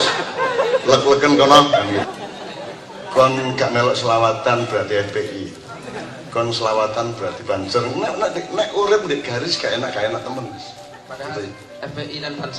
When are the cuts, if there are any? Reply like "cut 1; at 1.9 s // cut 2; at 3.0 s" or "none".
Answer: cut 1; at 2.0 s